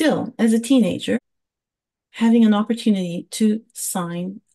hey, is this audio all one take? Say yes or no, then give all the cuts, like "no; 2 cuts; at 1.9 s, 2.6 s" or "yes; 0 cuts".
no; 1 cut; at 1.2 s